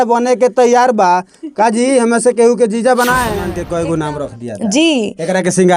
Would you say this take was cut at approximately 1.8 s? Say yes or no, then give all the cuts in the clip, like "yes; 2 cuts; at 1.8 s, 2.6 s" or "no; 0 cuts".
no; 1 cut; at 3.5 s